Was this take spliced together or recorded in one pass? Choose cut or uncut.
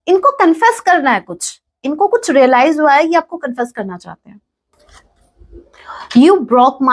cut